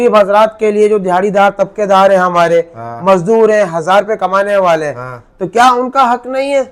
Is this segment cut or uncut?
uncut